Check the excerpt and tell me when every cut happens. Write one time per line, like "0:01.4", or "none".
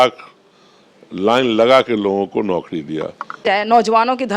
none